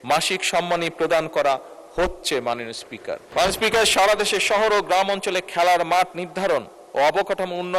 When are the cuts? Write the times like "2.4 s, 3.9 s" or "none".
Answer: 3.2 s